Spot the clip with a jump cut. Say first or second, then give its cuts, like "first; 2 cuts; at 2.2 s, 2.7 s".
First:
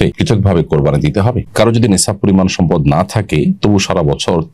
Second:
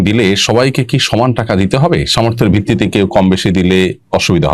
first; 1 cut; at 1.4 s